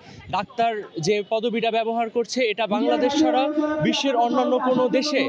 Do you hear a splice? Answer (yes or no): no